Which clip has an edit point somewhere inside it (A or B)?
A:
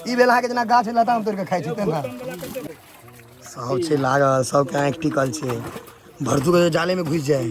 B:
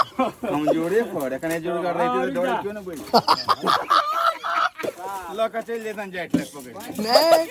A